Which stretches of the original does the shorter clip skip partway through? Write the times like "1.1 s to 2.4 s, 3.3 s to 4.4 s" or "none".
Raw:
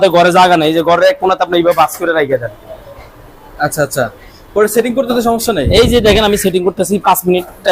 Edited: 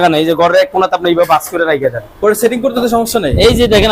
2.5 s to 4.4 s